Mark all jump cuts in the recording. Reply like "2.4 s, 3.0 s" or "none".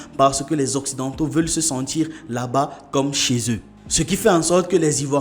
none